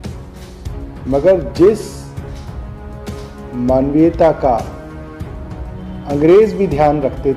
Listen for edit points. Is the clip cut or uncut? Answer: cut